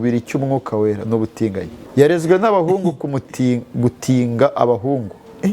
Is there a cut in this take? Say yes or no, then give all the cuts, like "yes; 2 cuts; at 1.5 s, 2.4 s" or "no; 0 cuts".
yes; 1 cut; at 1.8 s